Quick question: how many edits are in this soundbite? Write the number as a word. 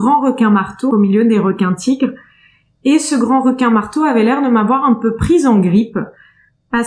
one